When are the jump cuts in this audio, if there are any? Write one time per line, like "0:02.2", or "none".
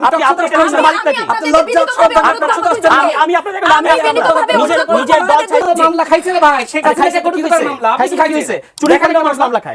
0:05.6